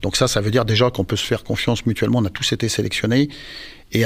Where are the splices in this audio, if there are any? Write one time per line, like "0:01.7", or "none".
none